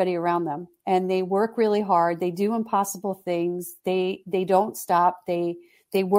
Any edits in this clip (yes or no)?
no